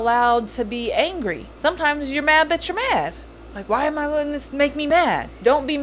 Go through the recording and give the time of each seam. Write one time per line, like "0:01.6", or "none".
0:01.5
0:04.9